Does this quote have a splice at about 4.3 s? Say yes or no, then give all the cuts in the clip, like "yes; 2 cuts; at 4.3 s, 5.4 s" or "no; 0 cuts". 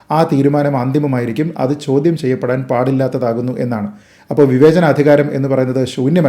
no; 0 cuts